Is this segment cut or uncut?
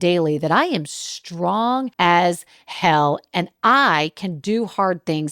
cut